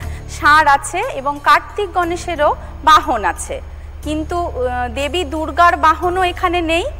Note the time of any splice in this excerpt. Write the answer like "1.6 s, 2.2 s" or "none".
none